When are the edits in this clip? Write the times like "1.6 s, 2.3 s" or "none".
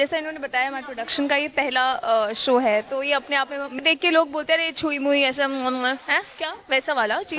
3.8 s